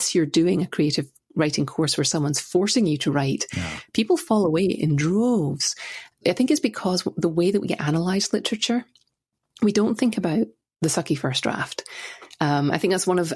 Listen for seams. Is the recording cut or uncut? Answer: cut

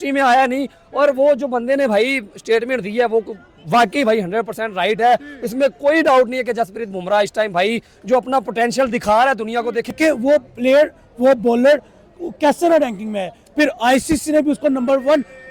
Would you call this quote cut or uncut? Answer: cut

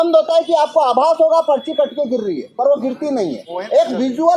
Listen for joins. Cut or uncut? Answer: cut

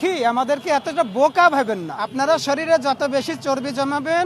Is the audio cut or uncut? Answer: cut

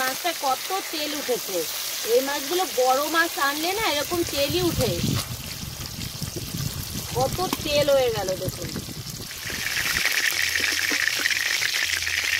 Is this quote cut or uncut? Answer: cut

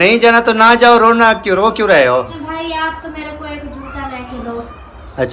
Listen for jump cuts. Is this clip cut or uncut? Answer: cut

